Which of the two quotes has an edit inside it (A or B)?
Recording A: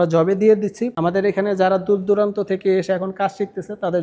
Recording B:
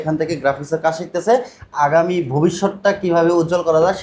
A